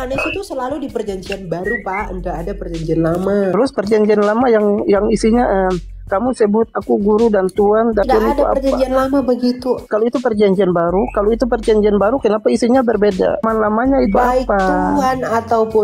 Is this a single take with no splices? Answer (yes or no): no